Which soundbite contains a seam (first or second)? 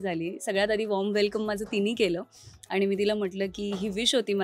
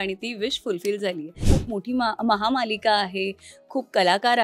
second